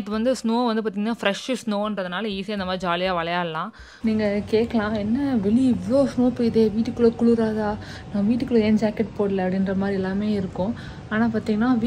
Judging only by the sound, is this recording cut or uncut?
cut